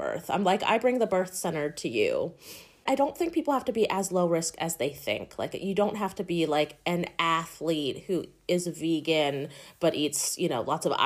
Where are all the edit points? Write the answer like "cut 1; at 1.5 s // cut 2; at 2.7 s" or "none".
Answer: cut 1; at 2.8 s